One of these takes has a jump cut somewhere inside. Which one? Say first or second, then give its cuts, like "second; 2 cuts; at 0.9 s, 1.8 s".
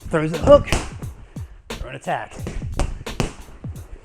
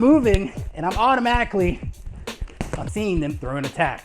second; 1 cut; at 2.9 s